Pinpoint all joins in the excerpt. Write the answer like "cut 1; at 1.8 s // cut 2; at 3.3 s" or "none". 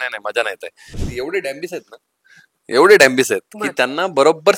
cut 1; at 1.0 s